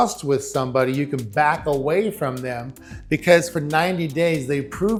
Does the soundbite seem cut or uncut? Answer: uncut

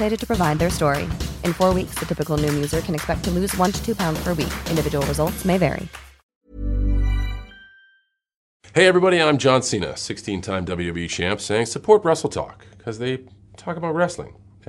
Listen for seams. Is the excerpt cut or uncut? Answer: cut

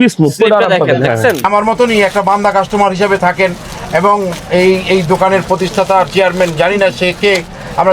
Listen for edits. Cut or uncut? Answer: cut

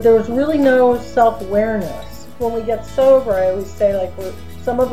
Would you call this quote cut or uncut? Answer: cut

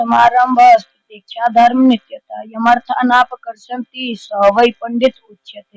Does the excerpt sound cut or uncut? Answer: uncut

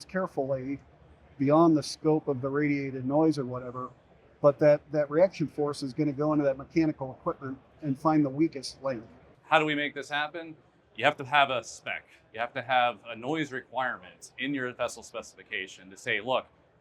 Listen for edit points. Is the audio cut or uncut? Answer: cut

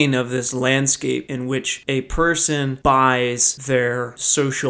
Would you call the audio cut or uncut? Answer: cut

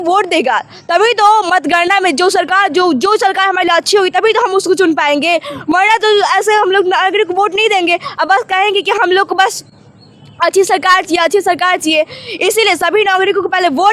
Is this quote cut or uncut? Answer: uncut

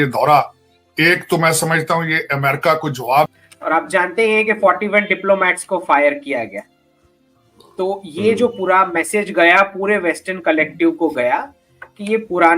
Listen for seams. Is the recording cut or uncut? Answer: cut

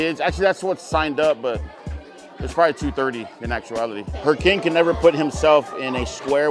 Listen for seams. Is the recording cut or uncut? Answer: uncut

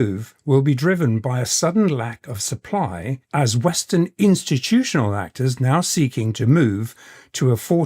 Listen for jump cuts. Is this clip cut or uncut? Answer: uncut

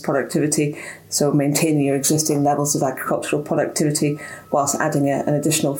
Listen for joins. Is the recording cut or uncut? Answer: uncut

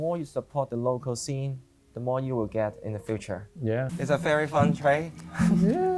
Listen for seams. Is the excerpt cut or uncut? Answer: cut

